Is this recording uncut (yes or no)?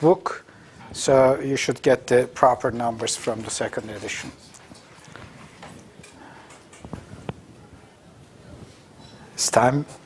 yes